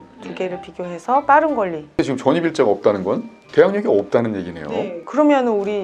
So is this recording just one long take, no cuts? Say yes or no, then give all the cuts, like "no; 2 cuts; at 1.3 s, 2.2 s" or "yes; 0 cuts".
no; 1 cut; at 1.8 s